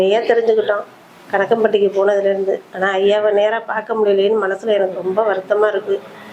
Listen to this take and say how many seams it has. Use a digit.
0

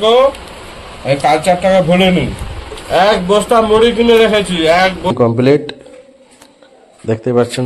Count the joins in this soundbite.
1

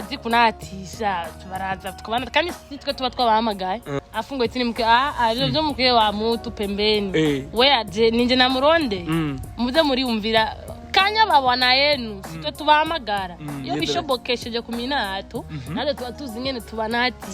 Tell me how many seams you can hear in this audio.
1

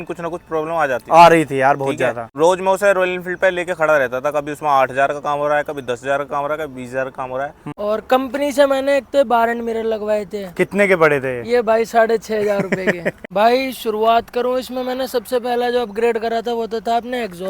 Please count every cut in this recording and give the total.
3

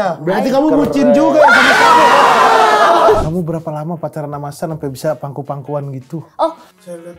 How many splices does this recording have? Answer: 1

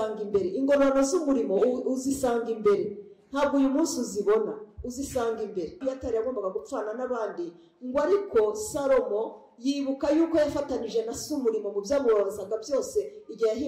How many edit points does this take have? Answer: 1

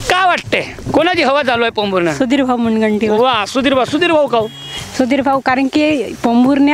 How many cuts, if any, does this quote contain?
0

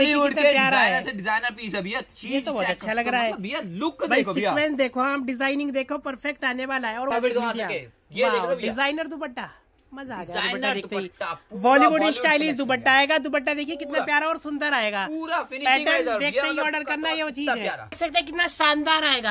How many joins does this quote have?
2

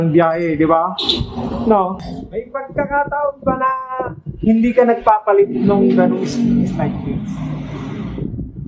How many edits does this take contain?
1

